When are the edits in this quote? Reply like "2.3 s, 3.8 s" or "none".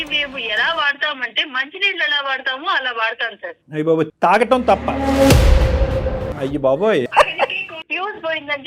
6.3 s, 7.8 s